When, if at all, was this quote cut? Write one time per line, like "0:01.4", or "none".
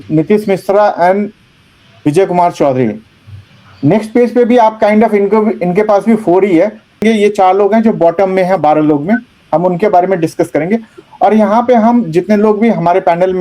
0:07.0